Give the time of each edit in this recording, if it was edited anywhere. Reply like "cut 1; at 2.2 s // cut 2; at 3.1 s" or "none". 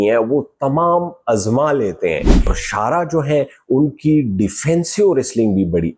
cut 1; at 2.6 s